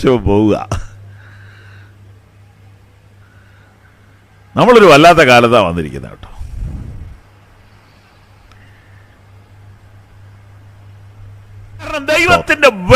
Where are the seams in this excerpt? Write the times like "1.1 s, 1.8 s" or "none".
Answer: 12.0 s